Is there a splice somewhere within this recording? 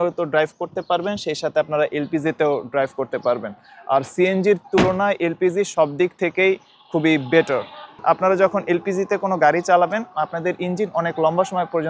no; 0 cuts

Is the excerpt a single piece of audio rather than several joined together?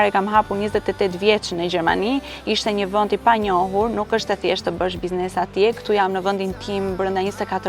yes; 0 cuts

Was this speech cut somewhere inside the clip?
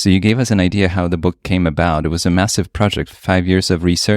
yes; 1 cut; at 3.1 s

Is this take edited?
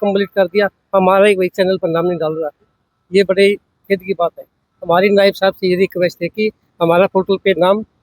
no; 0 cuts

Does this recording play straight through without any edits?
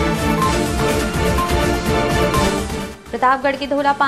no; 1 cut; at 2.9 s

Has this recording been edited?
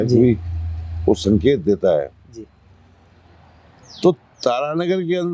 no; 0 cuts

